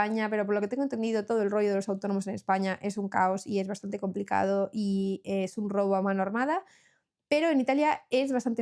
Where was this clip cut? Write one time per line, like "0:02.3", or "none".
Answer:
none